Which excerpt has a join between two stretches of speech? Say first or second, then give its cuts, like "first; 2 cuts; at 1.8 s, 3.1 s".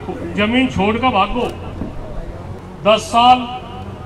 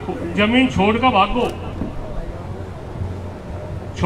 first; 1 cut; at 2.6 s